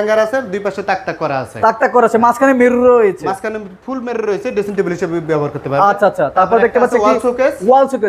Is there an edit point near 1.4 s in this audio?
no; 0 cuts

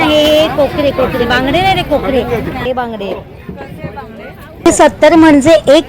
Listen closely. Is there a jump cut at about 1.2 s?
no; 2 cuts; at 2.6 s, 4.7 s

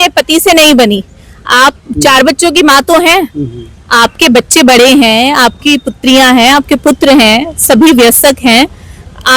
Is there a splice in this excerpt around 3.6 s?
no; 1 cut; at 1.9 s

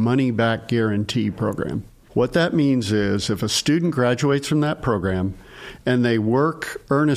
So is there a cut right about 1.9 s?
yes; 1 cut; at 1.9 s

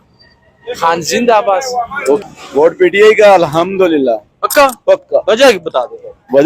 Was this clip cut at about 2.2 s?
yes; 1 cut; at 2.2 s

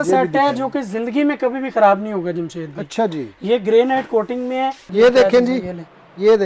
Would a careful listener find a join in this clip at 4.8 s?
yes; 1 cut; at 4.8 s

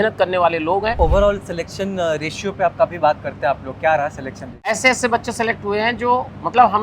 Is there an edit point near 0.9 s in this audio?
yes; 2 cuts; at 0.9 s, 4.8 s

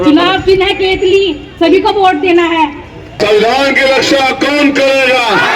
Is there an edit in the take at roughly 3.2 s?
yes; 1 cut; at 3.2 s

